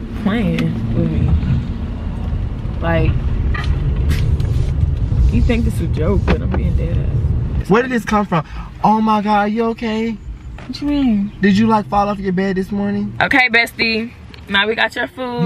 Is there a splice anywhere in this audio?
yes; 2 cuts; at 7.6 s, 13.1 s

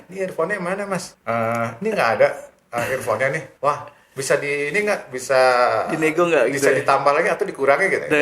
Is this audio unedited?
no; 2 cuts; at 1.1 s, 3.5 s

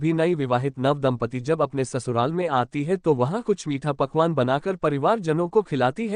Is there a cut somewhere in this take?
no; 0 cuts

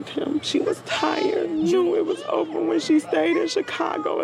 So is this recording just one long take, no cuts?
no; 1 cut; at 1.5 s

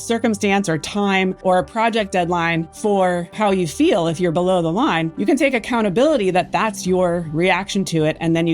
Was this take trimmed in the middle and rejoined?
yes; 2 cuts; at 1.4 s, 3.3 s

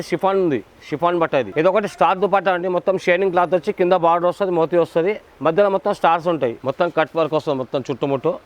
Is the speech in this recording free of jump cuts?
no; 2 cuts; at 1.5 s, 6.6 s

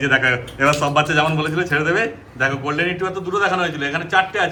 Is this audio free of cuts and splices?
yes; 0 cuts

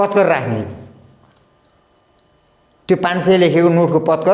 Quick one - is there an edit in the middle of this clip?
no; 0 cuts

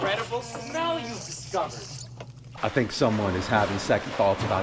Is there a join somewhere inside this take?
yes; 1 cut; at 2.5 s

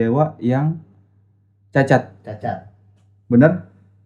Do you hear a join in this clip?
no; 0 cuts

